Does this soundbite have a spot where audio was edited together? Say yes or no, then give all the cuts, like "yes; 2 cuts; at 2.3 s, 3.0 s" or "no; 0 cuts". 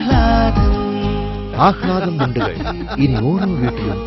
no; 0 cuts